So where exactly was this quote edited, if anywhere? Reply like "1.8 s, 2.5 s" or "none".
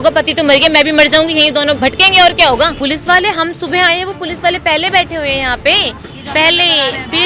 1.8 s, 2.8 s